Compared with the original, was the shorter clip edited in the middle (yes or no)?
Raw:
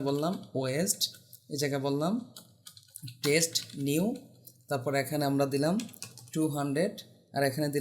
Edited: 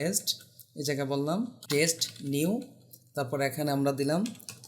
yes